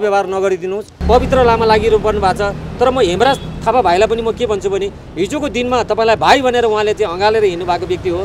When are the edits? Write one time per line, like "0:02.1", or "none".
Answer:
0:00.9